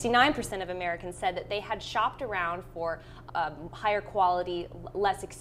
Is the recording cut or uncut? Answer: cut